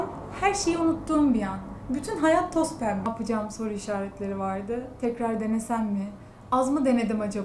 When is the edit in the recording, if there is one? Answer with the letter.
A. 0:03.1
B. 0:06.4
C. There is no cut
A